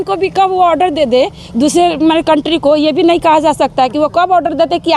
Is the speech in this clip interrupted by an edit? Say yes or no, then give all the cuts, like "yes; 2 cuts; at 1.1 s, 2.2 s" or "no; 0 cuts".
no; 0 cuts